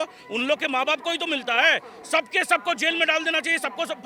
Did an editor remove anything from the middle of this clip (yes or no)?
no